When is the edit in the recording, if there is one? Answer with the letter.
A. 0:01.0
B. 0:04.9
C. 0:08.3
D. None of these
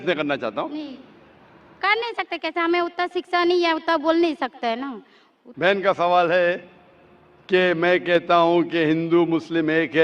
D